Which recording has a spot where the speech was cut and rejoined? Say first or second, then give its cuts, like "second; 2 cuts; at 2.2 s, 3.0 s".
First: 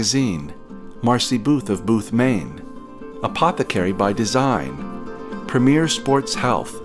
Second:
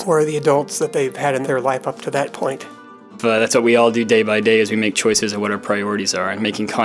second; 2 cuts; at 1.4 s, 3.1 s